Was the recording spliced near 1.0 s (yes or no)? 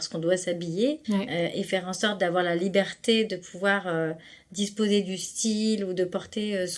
yes